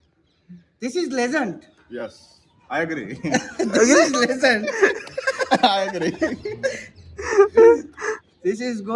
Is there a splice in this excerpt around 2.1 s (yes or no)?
no